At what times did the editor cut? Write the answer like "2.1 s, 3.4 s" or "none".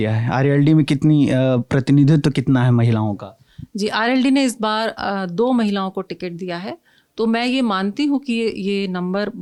none